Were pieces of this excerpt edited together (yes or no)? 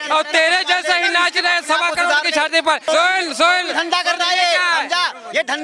yes